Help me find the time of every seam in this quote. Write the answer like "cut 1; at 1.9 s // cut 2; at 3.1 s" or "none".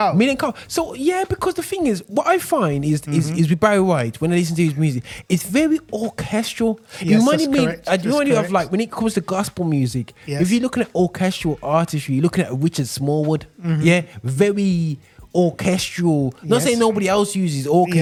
none